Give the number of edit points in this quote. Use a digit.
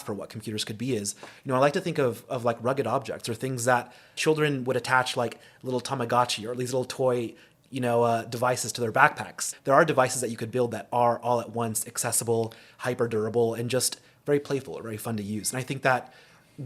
2